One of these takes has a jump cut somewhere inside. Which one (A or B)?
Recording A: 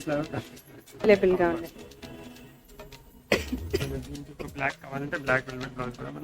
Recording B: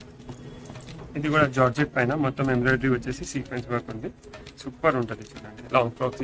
A